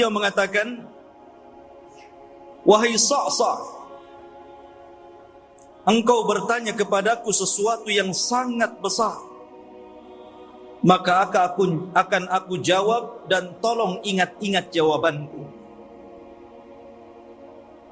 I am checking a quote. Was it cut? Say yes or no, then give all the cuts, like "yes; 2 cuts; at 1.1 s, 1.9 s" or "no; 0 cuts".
no; 0 cuts